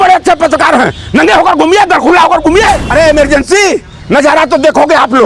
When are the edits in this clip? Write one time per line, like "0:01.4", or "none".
0:02.8